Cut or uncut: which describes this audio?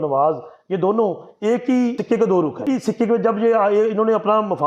cut